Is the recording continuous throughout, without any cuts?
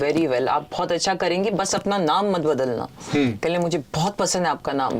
yes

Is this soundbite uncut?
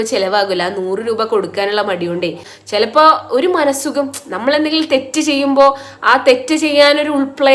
no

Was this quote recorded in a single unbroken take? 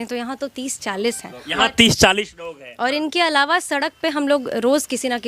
yes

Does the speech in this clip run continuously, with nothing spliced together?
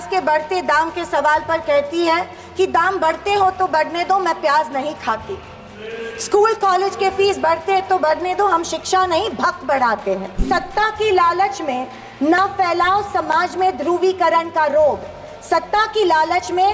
no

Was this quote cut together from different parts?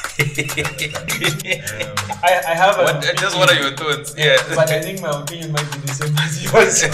yes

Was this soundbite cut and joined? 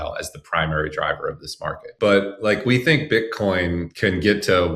yes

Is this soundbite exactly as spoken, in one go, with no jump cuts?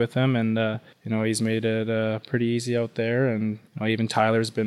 no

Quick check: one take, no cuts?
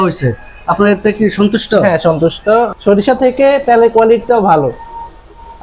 no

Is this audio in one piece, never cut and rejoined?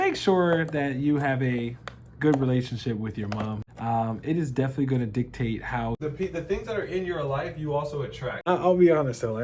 no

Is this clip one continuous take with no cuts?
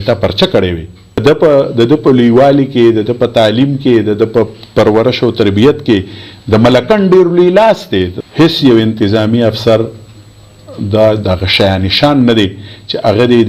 no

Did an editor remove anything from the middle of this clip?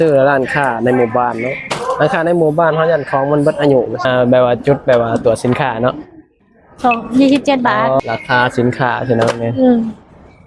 yes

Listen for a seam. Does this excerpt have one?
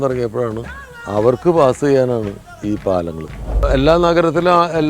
yes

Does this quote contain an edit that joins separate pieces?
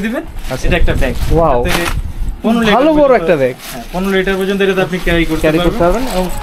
no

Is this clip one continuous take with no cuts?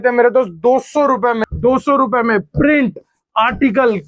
no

